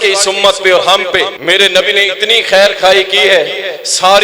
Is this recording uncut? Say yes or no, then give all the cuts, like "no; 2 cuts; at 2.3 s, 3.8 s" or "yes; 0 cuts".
no; 1 cut; at 1.4 s